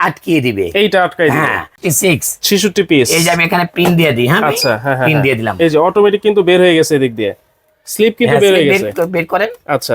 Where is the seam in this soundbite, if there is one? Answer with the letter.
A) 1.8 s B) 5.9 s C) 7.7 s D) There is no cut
A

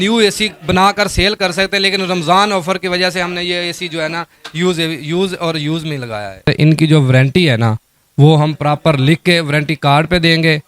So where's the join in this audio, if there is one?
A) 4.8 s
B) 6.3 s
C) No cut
B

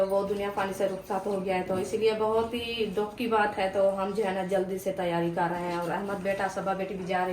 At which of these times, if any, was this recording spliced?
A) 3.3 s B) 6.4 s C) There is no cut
C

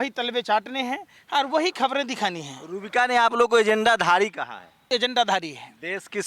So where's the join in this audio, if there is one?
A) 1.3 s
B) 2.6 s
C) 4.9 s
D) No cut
C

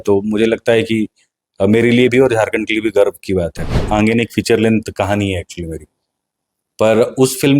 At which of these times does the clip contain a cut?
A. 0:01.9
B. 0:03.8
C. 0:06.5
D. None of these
B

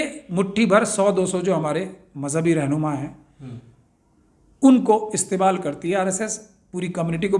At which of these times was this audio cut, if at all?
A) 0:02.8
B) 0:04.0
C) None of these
C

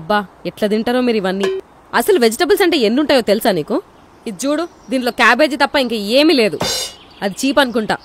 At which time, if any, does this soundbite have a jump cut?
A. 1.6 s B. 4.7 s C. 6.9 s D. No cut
A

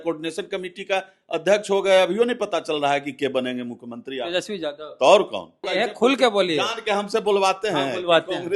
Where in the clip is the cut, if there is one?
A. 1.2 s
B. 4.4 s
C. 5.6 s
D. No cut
C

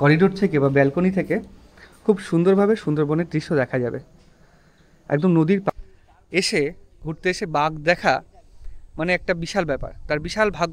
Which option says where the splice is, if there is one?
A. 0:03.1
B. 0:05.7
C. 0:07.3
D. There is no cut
B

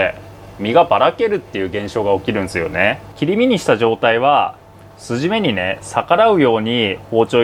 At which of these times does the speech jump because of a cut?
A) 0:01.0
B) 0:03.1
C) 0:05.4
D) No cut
B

